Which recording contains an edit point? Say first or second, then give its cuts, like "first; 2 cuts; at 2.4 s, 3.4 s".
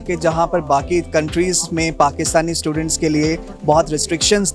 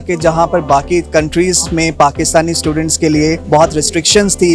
second; 1 cut; at 3.4 s